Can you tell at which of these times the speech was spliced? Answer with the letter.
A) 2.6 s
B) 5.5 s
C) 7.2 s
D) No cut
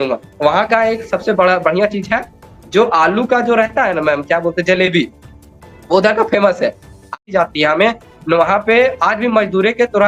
C